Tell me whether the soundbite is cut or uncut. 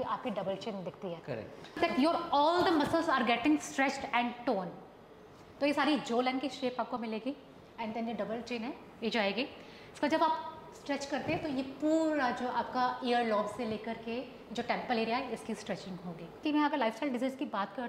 cut